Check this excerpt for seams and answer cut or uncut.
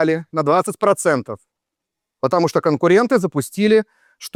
uncut